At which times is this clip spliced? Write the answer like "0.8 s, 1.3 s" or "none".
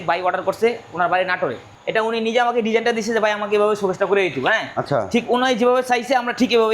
1.7 s